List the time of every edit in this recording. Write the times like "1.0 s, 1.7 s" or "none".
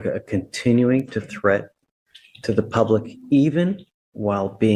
none